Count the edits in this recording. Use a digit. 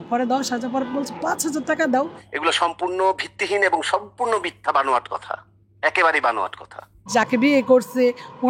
2